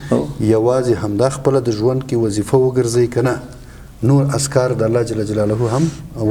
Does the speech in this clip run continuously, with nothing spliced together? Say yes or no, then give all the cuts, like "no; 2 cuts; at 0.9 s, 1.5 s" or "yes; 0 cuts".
yes; 0 cuts